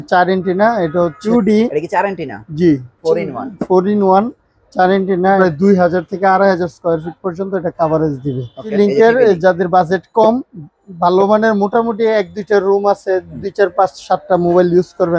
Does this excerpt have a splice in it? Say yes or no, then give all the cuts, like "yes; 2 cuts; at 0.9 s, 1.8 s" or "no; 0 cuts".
yes; 3 cuts; at 1.2 s, 5.4 s, 8.7 s